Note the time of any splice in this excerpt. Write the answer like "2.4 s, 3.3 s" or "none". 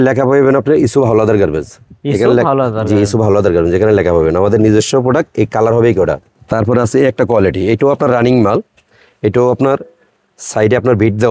6.3 s

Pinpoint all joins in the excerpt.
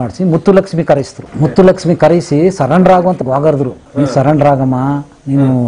1.2 s, 3.2 s

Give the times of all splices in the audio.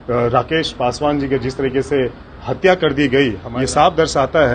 3.4 s

